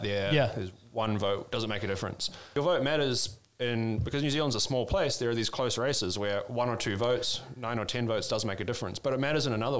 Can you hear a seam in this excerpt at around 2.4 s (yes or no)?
yes